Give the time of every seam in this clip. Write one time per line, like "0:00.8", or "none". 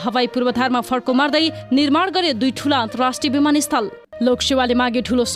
0:04.1